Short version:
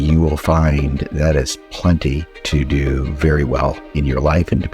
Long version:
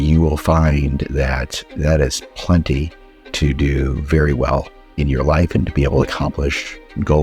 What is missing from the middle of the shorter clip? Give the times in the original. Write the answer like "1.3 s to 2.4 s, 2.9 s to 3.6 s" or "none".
1.0 s to 1.7 s, 3.0 s to 3.2 s, 4.8 s to 4.9 s